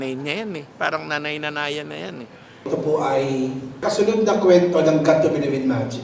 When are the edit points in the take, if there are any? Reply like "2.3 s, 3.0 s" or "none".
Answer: 2.5 s, 3.8 s